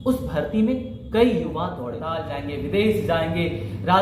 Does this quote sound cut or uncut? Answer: cut